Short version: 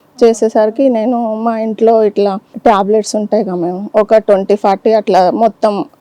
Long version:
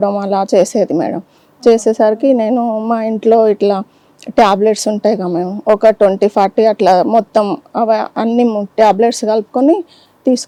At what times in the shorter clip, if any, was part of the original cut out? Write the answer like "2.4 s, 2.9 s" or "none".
2.5 s